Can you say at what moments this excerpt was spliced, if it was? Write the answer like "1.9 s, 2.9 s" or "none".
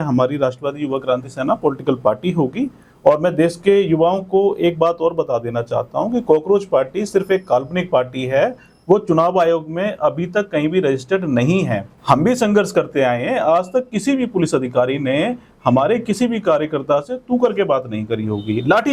none